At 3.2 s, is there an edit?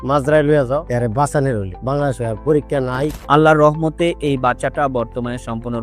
yes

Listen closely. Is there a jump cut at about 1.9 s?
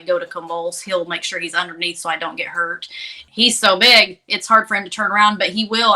no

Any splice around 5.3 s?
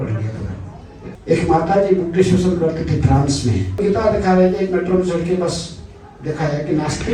no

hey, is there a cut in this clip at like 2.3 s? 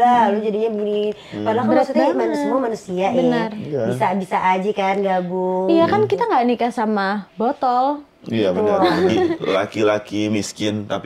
no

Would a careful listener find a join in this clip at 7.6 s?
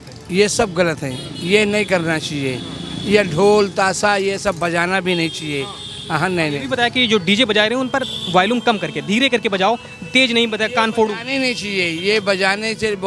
no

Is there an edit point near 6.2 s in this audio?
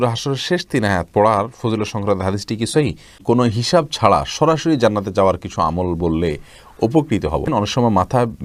no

